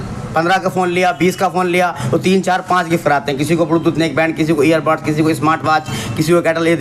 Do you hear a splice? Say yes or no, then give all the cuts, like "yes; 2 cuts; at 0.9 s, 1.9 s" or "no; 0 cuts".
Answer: no; 0 cuts